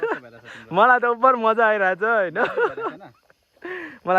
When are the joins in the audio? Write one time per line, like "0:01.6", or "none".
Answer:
none